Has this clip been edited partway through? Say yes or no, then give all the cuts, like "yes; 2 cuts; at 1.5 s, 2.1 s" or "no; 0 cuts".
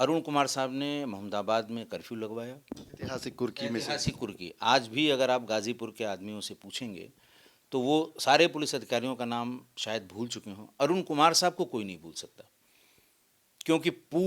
no; 0 cuts